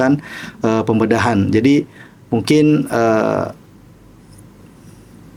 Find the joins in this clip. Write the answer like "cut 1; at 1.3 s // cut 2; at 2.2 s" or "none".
none